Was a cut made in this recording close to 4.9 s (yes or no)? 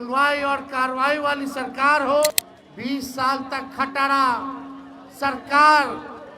no